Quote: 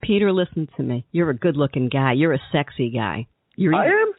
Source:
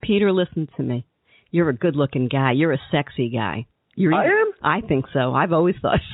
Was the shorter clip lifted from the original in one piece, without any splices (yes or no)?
no